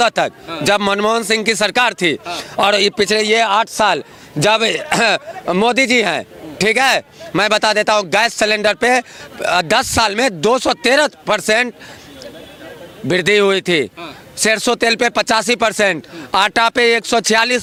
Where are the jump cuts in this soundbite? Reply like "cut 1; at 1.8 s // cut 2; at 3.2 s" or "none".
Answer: none